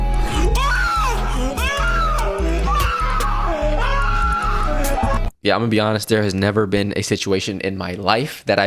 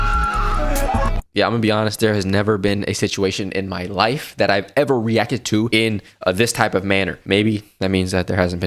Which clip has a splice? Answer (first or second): second